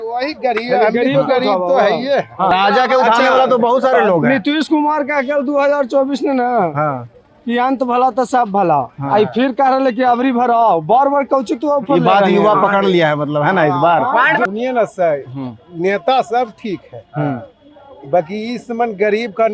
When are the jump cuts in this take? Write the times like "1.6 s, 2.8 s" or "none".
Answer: 2.5 s, 14.5 s